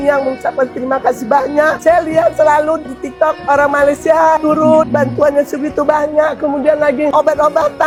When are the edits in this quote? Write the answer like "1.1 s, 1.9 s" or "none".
none